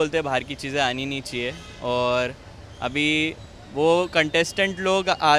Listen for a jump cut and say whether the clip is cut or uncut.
uncut